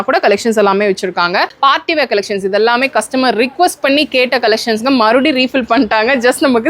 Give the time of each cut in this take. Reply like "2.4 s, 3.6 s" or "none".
1.5 s